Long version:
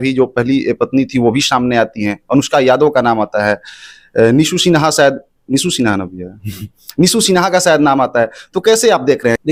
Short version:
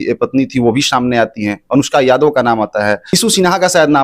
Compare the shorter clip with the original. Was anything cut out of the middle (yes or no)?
yes